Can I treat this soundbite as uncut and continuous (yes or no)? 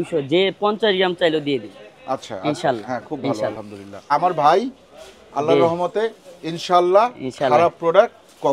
no